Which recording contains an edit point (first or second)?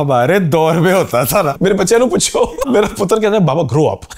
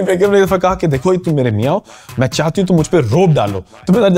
first